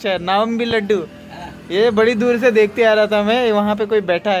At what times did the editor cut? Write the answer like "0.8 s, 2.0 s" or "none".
none